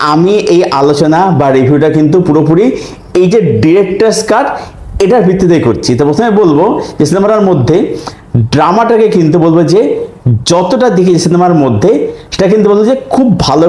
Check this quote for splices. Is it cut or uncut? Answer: uncut